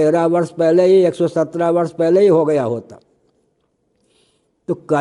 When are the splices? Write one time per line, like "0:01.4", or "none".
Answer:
none